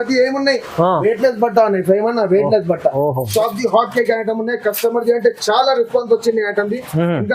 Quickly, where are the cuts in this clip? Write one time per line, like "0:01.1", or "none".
0:03.2

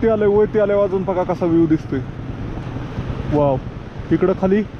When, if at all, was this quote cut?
none

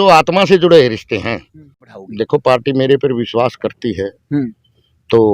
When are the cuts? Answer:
0:01.9

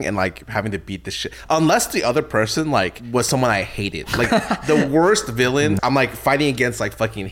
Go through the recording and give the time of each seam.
0:03.0
0:05.8

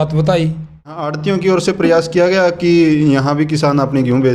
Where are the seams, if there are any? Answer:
0:01.2

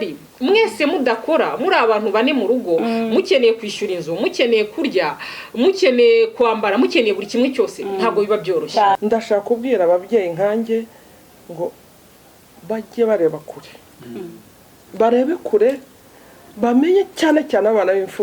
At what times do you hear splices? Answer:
0:09.0

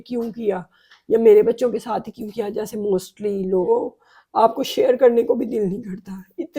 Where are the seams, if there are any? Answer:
0:03.7

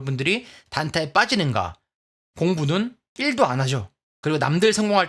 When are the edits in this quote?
0:02.1

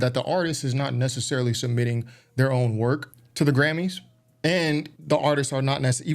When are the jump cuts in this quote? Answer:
0:03.2
0:04.9

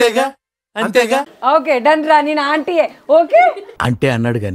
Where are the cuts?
0:01.3

